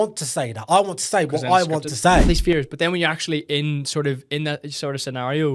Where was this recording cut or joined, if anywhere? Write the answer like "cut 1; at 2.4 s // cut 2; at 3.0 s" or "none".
cut 1; at 2.2 s